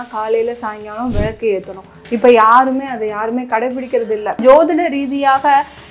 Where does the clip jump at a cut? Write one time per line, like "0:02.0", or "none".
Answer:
0:04.4